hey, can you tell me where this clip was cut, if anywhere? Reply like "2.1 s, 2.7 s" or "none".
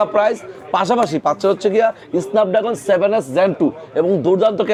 none